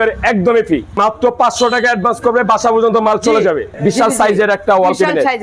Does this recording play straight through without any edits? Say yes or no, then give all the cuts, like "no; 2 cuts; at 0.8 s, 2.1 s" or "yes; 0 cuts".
no; 2 cuts; at 1.0 s, 3.7 s